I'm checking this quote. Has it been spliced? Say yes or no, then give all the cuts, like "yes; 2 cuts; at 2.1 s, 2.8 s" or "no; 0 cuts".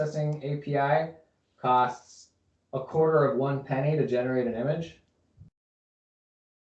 no; 0 cuts